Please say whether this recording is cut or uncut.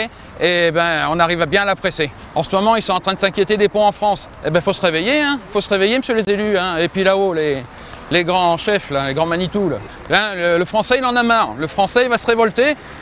cut